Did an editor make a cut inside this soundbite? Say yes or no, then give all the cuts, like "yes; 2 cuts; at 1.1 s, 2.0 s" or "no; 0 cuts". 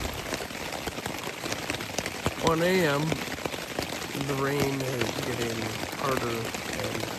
no; 0 cuts